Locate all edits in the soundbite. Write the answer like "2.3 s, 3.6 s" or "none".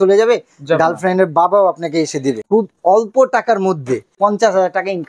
2.4 s, 4.2 s